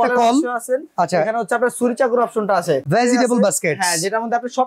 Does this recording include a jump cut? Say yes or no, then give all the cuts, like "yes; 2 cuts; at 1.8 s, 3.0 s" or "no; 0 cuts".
yes; 1 cut; at 2.8 s